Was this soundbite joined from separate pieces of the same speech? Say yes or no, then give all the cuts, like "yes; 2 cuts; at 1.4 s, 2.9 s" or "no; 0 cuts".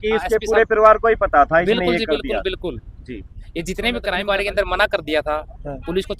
yes; 1 cut; at 4.2 s